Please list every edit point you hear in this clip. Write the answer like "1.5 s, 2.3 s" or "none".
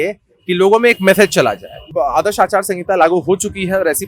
1.9 s